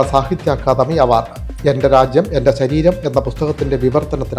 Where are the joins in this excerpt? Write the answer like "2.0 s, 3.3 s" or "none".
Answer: none